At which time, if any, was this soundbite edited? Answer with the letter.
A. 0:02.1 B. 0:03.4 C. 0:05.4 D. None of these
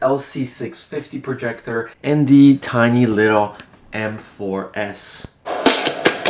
D